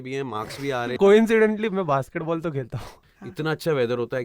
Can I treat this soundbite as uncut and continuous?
no; 2 cuts; at 1.0 s, 2.9 s

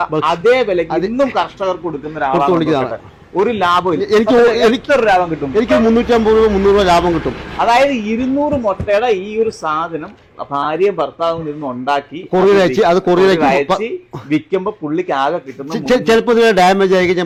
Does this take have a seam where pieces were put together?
no; 0 cuts

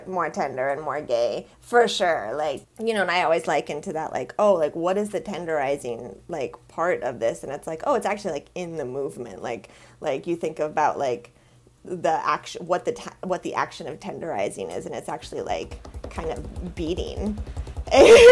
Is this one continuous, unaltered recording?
no; 1 cut; at 2.7 s

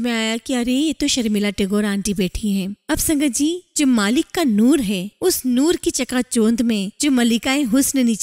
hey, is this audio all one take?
yes; 0 cuts

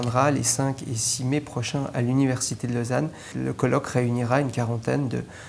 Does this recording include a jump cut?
yes; 1 cut; at 3.3 s

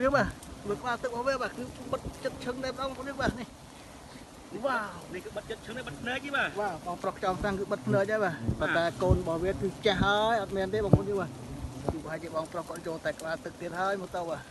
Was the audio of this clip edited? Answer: no; 0 cuts

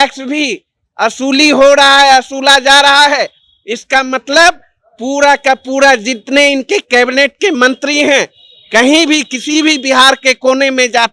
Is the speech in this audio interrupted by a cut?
no; 0 cuts

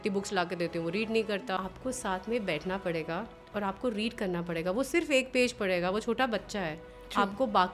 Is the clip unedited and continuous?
no; 1 cut; at 1.4 s

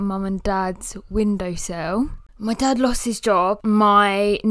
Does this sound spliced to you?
yes; 2 cuts; at 2.2 s, 3.6 s

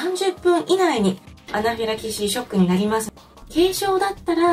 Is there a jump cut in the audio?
yes; 2 cuts; at 1.4 s, 3.0 s

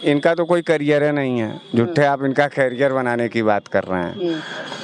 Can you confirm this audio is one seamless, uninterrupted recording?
yes; 0 cuts

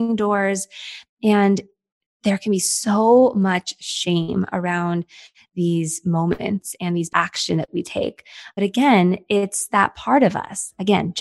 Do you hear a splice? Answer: yes; 1 cut; at 8.6 s

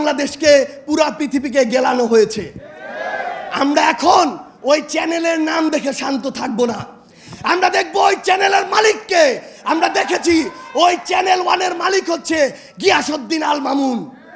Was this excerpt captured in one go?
yes; 0 cuts

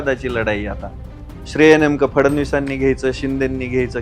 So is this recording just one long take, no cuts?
yes; 0 cuts

